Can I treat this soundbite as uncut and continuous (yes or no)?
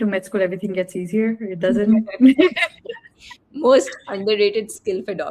yes